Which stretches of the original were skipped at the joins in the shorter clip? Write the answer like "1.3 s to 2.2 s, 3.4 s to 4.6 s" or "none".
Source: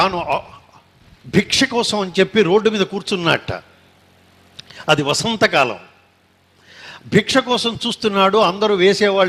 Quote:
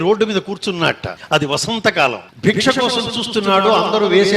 3.6 s to 4.7 s, 5.8 s to 7.0 s